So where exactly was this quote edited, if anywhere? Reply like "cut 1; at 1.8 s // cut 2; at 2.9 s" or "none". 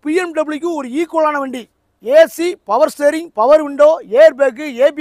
none